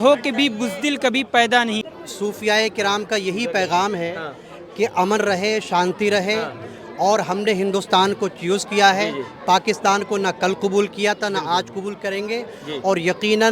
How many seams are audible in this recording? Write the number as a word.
one